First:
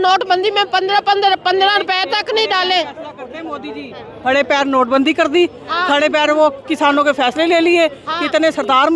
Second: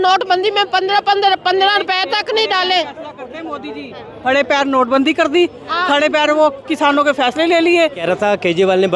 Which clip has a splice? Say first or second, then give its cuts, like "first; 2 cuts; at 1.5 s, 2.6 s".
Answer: second; 1 cut; at 8.0 s